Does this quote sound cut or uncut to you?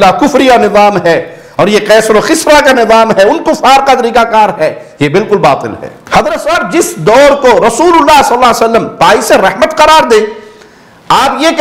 cut